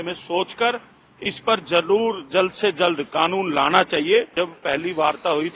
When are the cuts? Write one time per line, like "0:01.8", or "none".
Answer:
0:04.3